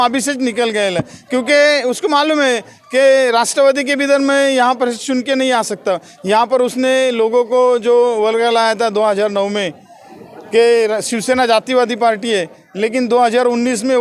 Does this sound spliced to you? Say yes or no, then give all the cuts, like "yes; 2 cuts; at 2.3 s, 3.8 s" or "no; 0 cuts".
no; 0 cuts